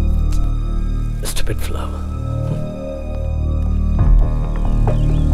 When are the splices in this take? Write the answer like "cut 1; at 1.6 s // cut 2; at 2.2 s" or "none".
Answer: none